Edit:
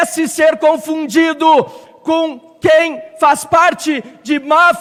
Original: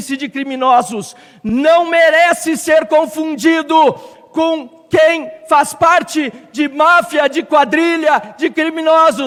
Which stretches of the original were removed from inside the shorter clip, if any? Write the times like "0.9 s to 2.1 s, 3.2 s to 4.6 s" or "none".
none